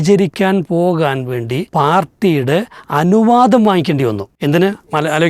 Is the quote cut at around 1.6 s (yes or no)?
yes